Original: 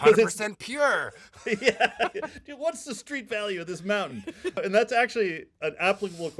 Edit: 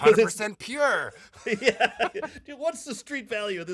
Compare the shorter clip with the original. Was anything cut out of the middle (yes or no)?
no